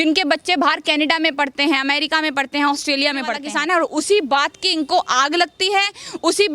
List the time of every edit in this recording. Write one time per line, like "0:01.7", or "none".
0:03.4